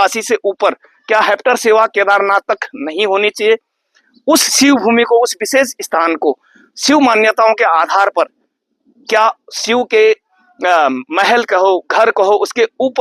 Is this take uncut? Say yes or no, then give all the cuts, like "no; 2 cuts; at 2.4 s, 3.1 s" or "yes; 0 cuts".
yes; 0 cuts